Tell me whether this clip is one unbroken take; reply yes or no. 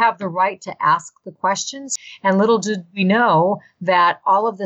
no